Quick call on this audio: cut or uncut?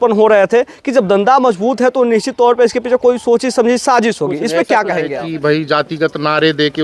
cut